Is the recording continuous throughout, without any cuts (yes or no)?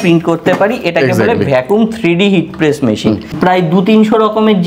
no